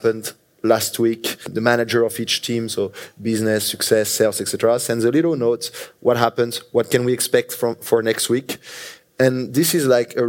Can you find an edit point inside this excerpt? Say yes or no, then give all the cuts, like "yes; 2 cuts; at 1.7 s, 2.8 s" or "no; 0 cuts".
yes; 1 cut; at 1.5 s